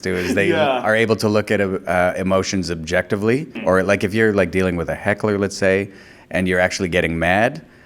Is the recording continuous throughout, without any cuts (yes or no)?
no